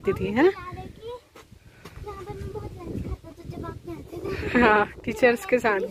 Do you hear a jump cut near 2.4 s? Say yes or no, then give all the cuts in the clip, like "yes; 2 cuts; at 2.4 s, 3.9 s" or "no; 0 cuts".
no; 0 cuts